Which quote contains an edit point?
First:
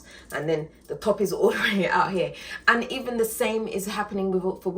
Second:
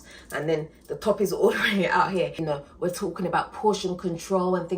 second; 1 cut; at 2.4 s

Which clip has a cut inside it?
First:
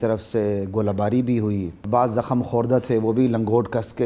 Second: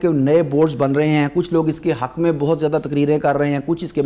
first; 1 cut; at 1.8 s

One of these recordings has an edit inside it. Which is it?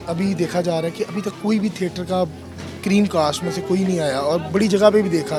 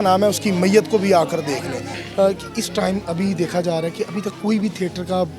second; 1 cut; at 1.9 s

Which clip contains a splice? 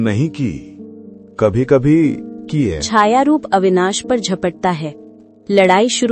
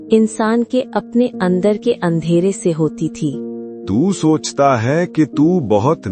first; 1 cut; at 2.8 s

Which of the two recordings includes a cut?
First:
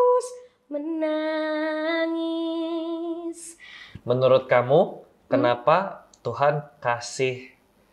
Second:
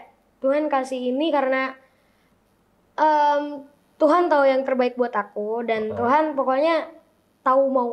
first; 1 cut; at 3.9 s

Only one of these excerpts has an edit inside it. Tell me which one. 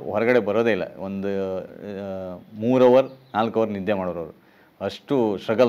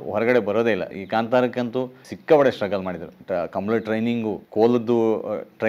second; 4 cuts; at 1.0 s, 2.1 s, 3.1 s, 4.4 s

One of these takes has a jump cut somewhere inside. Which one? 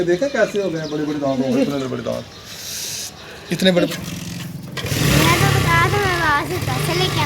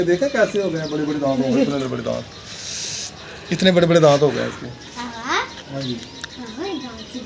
first; 1 cut; at 3.8 s

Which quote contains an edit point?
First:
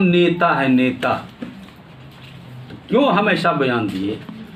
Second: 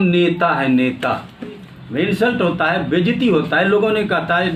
second; 1 cut; at 1.8 s

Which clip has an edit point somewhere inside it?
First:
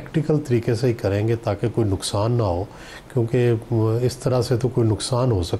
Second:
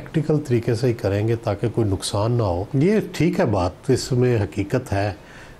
second; 1 cut; at 2.7 s

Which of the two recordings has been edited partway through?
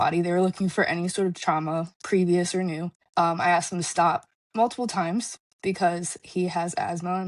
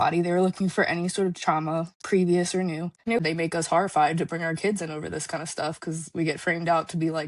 second; 1 cut; at 3.1 s

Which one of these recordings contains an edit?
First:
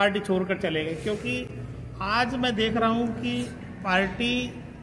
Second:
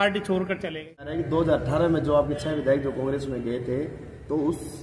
second; 1 cut; at 1.2 s

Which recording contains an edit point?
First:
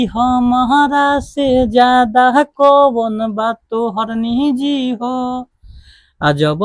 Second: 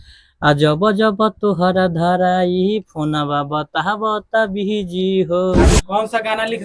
second; 1 cut; at 5.7 s

